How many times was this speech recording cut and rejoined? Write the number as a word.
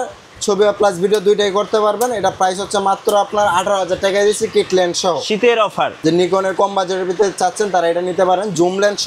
one